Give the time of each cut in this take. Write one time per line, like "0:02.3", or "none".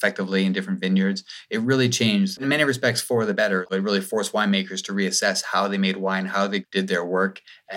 0:02.4
0:03.7
0:06.6